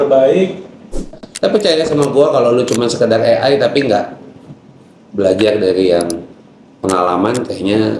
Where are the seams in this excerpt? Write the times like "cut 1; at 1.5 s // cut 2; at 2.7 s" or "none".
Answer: cut 1; at 1.2 s